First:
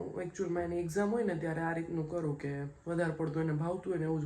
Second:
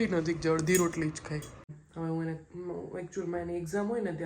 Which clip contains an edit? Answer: second; 1 cut; at 1.8 s

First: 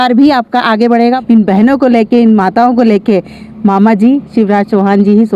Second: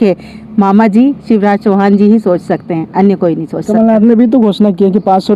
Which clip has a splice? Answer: first; 1 cut; at 1.2 s

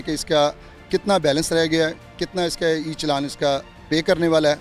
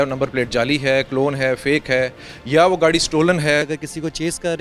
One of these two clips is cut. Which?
second; 1 cut; at 3.6 s

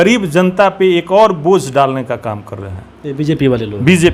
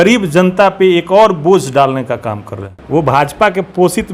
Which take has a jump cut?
second; 1 cut; at 2.8 s

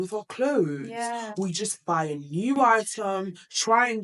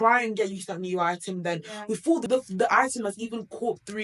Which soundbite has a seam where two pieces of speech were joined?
second; 1 cut; at 2.2 s

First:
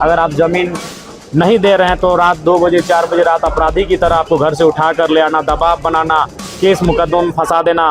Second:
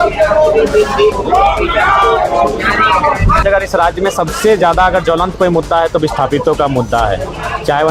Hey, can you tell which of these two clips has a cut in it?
second; 1 cut; at 3.4 s

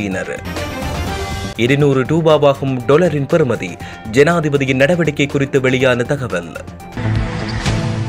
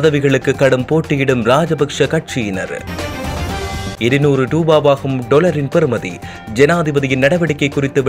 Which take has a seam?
first; 1 cut; at 6.9 s

